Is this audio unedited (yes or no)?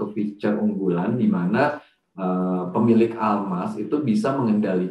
yes